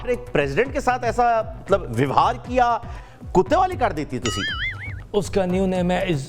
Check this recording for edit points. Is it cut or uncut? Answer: cut